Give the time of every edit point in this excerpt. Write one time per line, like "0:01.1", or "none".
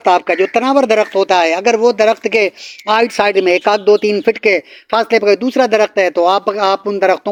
none